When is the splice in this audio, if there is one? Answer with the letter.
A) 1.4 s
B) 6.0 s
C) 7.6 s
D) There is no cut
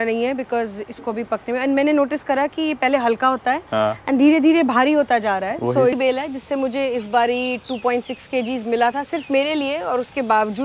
B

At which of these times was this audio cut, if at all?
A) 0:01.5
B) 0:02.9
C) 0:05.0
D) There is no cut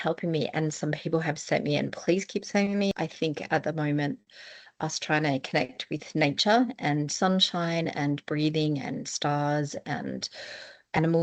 B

